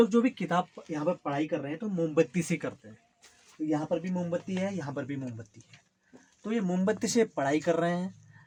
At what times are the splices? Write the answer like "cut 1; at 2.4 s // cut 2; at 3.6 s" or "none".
none